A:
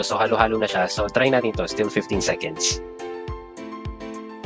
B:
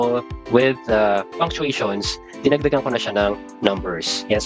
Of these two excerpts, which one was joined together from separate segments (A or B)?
A